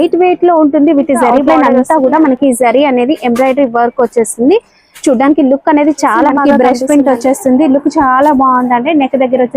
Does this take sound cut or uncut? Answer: cut